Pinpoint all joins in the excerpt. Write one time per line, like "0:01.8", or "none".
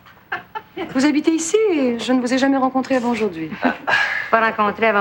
none